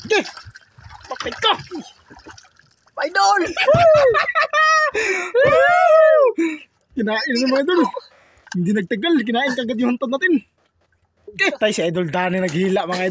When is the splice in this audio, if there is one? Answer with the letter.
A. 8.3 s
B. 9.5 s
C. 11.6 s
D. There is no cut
C